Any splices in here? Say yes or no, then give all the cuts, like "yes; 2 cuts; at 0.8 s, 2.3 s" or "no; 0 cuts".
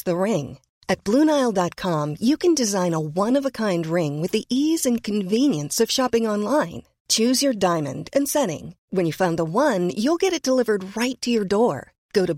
no; 0 cuts